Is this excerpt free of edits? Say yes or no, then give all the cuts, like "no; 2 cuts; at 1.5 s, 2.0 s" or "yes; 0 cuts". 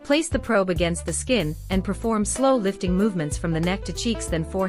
no; 1 cut; at 1.6 s